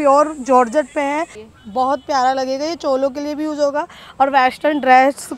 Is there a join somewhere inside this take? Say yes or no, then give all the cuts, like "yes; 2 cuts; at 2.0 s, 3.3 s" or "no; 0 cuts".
yes; 1 cut; at 1.4 s